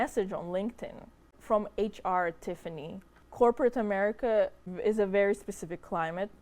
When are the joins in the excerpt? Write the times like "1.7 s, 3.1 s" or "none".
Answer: 1.3 s, 3.2 s, 4.6 s